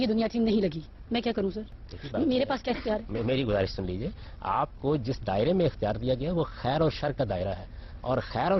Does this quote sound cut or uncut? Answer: uncut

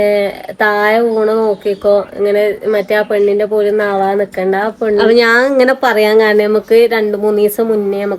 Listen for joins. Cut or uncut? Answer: cut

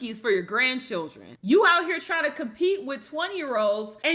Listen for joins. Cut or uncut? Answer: cut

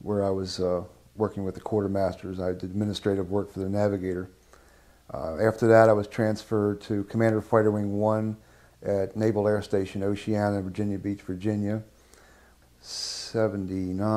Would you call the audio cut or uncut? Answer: cut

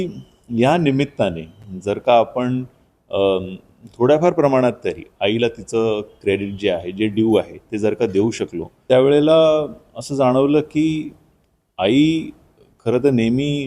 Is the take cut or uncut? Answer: cut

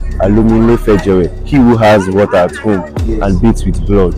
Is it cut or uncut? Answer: uncut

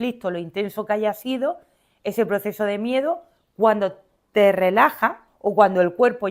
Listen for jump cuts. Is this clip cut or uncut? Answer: cut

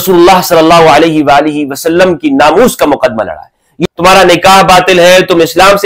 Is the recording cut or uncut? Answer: cut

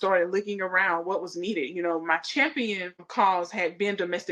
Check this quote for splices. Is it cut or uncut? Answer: cut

